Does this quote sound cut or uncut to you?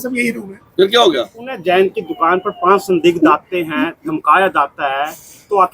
cut